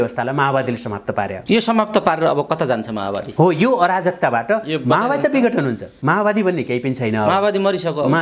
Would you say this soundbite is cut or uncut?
cut